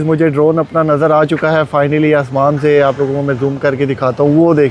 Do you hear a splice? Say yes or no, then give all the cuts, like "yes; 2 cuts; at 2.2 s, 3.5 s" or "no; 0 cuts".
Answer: no; 0 cuts